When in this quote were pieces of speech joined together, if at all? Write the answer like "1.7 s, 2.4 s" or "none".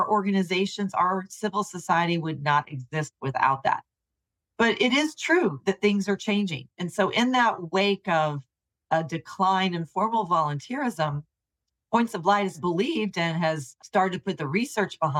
6.7 s, 12.6 s, 13.7 s